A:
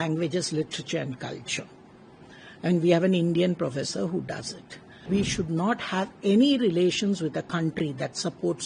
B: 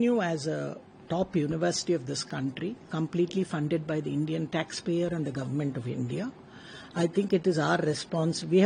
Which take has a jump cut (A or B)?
A